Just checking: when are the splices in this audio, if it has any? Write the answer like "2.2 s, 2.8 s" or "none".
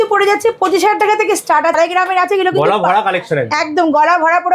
1.8 s